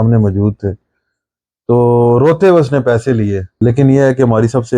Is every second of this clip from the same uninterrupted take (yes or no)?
no